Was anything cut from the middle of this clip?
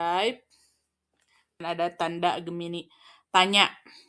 yes; 1 cut; at 1.6 s

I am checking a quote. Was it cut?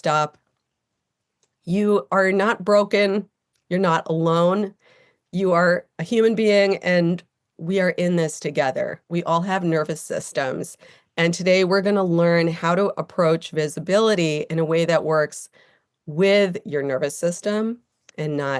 no; 0 cuts

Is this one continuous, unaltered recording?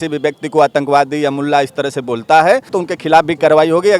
no; 1 cut; at 2.8 s

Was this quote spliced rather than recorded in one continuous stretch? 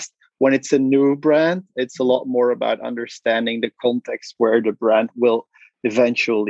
no; 0 cuts

